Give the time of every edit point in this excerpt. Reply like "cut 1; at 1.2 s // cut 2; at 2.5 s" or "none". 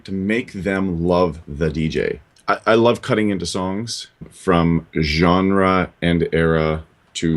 cut 1; at 2.3 s // cut 2; at 4.3 s